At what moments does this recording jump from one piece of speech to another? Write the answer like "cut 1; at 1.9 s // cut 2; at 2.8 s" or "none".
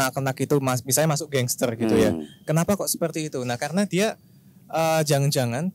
none